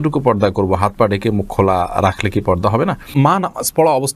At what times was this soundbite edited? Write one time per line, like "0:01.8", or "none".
0:03.1